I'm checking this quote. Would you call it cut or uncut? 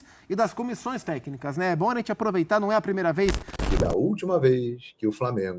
cut